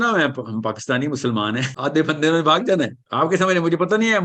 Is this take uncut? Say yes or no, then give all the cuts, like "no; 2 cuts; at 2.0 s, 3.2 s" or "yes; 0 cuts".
no; 2 cuts; at 1.7 s, 3.0 s